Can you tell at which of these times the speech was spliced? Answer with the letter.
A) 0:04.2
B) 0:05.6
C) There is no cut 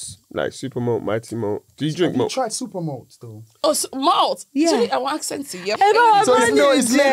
B